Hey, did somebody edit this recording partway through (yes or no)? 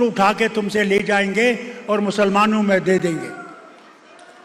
no